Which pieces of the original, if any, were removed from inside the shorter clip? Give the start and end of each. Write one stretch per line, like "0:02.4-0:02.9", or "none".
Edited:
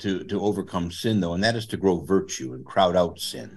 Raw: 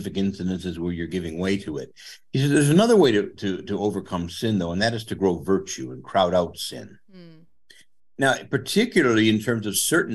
none